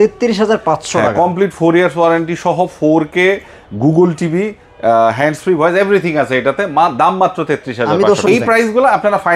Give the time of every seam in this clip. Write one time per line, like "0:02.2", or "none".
0:08.2